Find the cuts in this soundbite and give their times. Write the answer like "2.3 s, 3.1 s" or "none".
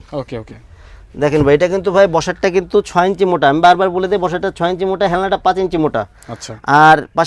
none